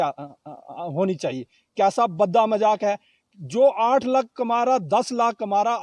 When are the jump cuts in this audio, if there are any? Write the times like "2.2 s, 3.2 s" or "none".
none